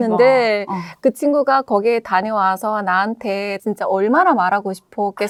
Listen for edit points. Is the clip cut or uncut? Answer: uncut